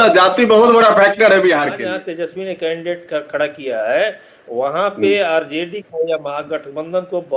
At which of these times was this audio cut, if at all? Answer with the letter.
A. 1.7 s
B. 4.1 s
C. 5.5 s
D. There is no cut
A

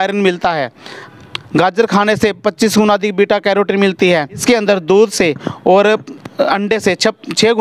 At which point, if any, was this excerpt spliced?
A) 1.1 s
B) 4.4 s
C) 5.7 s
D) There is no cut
B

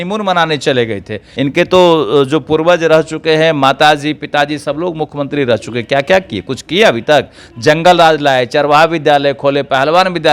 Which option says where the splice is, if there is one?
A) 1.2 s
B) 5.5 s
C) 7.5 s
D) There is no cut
A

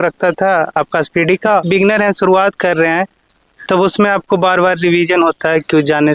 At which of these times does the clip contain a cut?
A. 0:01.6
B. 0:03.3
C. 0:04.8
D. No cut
A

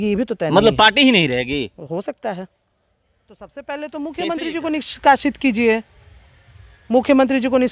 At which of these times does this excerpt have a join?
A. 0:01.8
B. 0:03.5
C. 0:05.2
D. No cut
B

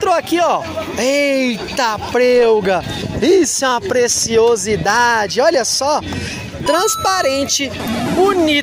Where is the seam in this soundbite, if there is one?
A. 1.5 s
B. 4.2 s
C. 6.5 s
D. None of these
D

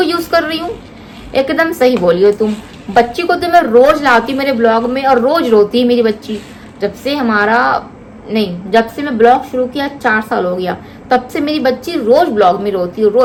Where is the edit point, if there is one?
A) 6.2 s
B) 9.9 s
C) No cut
C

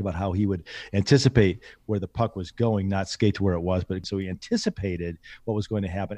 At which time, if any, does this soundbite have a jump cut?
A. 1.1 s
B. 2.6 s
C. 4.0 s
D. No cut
C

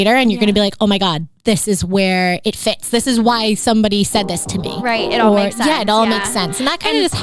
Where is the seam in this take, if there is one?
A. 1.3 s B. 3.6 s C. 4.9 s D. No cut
D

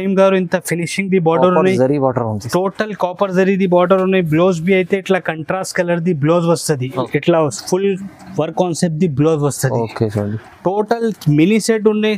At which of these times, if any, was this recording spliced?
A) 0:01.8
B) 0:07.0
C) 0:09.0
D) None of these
B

